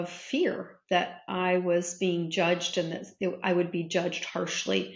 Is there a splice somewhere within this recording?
no; 0 cuts

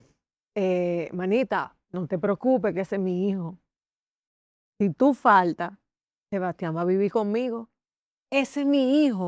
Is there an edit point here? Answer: no; 0 cuts

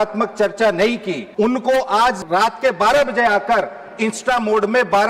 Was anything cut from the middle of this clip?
yes; 2 cuts; at 1.2 s, 2.2 s

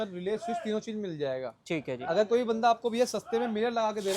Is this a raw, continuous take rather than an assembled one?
yes; 0 cuts

